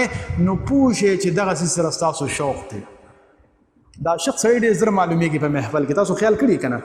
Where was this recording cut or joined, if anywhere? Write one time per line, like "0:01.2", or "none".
none